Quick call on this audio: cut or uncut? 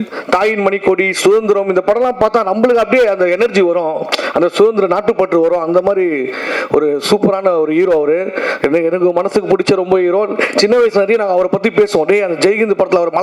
uncut